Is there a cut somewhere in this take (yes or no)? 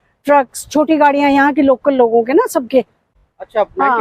yes